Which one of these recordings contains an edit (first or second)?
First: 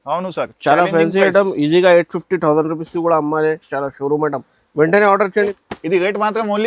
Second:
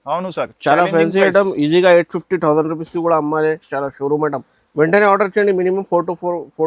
first